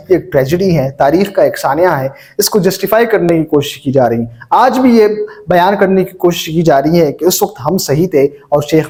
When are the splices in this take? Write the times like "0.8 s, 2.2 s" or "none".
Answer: none